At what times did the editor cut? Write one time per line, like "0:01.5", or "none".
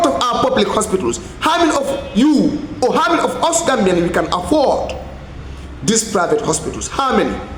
none